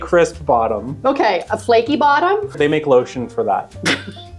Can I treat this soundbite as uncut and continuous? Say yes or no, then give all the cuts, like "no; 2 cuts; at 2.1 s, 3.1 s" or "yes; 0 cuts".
no; 1 cut; at 2.6 s